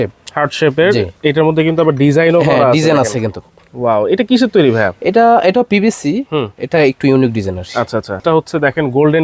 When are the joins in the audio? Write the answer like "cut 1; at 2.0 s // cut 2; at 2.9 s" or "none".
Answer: cut 1; at 8.2 s